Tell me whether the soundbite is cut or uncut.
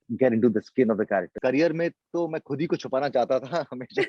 cut